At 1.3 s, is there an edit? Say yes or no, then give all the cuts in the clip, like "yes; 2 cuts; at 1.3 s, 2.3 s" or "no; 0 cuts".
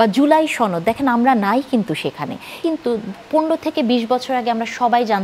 no; 1 cut; at 2.6 s